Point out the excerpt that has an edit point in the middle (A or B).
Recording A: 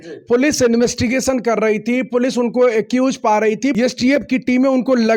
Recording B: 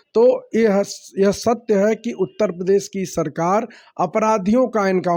A